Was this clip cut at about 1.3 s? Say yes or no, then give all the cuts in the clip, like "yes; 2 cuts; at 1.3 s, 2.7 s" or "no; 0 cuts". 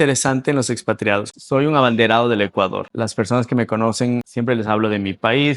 yes; 3 cuts; at 1.3 s, 2.8 s, 4.3 s